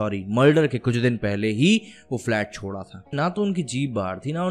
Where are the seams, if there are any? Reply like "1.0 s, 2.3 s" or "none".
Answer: 3.1 s